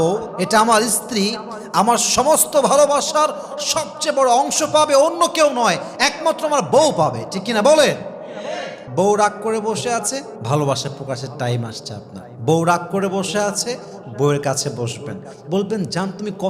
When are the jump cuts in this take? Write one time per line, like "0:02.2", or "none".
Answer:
0:08.8